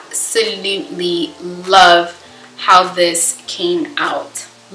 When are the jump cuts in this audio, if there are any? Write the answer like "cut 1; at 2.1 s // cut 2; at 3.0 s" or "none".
none